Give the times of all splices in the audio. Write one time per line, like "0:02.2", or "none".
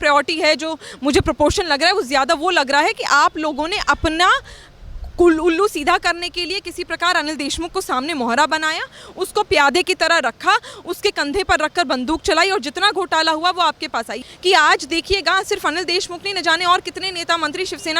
0:14.1